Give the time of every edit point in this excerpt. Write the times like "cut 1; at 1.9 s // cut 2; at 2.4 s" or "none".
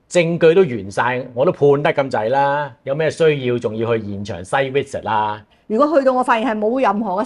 cut 1; at 5.5 s